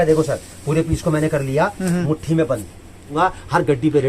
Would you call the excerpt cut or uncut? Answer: cut